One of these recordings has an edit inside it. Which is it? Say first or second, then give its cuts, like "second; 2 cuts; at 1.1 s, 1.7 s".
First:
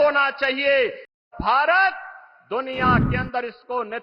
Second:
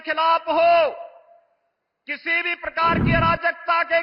first; 1 cut; at 1.2 s